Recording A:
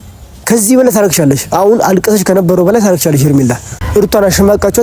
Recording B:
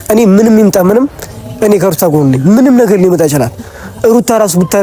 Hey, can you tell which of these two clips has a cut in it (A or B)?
A